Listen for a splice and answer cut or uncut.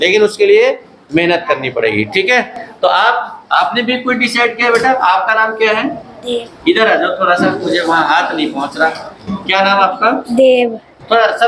uncut